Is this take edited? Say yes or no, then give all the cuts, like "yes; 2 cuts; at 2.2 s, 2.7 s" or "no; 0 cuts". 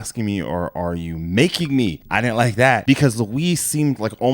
yes; 1 cut; at 2.8 s